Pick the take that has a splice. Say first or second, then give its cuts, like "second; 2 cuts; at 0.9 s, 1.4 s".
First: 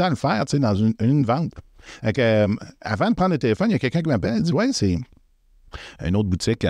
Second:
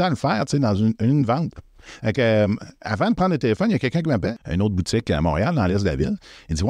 second; 1 cut; at 4.3 s